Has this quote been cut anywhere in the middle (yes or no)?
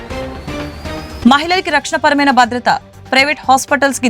yes